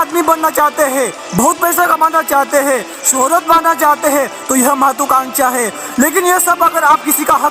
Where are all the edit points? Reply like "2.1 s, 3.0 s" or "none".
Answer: none